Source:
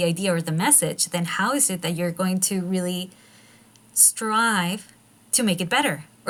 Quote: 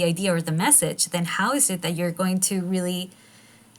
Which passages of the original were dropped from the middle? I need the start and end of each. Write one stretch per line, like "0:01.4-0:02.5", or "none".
none